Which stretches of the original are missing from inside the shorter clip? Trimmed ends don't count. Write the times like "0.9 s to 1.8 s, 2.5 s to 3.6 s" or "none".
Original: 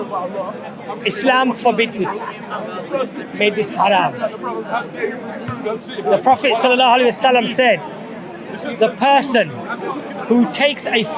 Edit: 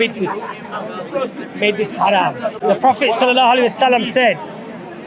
4.3 s to 6.0 s